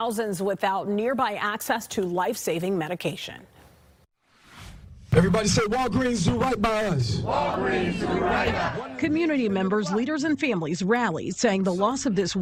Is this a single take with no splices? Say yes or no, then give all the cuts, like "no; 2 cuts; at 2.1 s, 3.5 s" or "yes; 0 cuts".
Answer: yes; 0 cuts